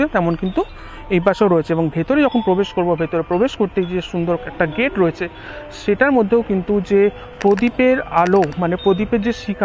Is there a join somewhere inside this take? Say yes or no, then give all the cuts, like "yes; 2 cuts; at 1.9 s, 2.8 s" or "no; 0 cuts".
no; 0 cuts